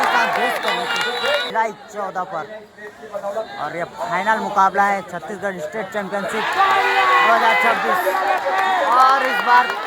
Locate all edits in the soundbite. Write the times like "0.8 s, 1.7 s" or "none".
1.5 s